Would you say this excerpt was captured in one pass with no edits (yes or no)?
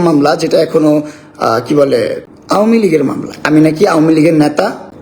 no